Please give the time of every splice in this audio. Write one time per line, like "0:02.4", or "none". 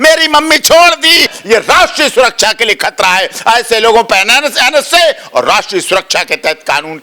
0:01.4